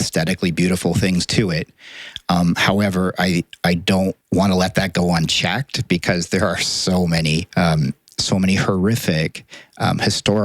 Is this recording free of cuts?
no; 2 cuts; at 4.2 s, 7.5 s

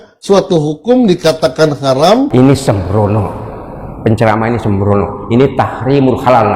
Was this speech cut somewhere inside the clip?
yes; 1 cut; at 2.3 s

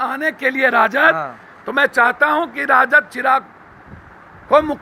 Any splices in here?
no; 0 cuts

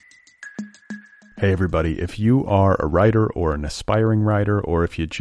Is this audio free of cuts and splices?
no; 1 cut; at 0.9 s

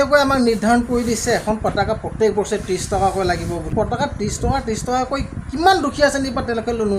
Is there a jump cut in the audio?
yes; 1 cut; at 3.7 s

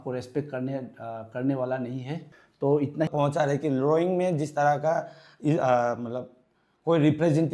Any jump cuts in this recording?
yes; 1 cut; at 3.1 s

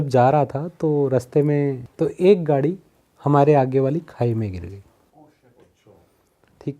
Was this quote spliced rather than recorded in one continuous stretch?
yes; 1 cut; at 1.8 s

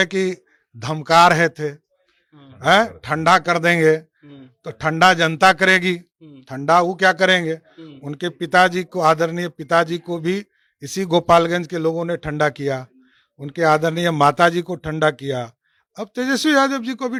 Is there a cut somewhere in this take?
no; 0 cuts

